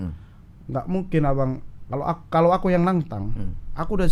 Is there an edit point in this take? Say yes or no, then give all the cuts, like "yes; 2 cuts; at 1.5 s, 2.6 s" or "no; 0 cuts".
no; 0 cuts